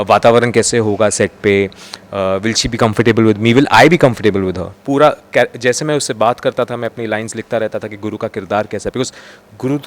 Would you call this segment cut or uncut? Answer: cut